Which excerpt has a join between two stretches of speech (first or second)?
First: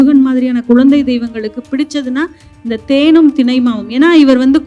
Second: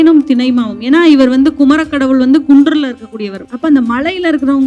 second